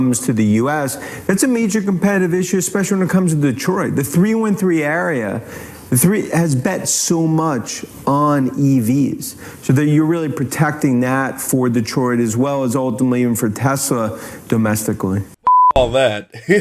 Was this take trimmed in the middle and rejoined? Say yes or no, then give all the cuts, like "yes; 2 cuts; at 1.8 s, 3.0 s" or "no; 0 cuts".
no; 0 cuts